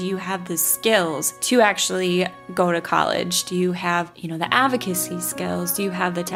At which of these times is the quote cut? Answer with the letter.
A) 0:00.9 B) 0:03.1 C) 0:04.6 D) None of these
D